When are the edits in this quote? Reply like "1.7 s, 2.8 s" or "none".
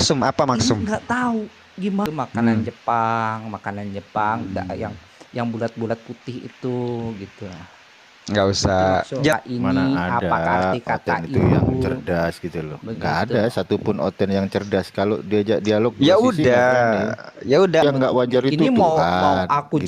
2.1 s, 9.3 s, 17.8 s